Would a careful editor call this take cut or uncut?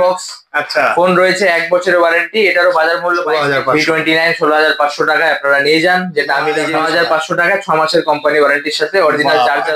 cut